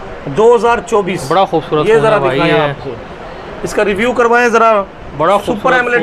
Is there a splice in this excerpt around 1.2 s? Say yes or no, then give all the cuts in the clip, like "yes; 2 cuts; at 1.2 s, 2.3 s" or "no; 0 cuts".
no; 0 cuts